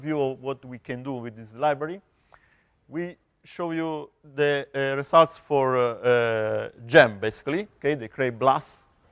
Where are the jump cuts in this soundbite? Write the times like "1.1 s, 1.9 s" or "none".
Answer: 4.8 s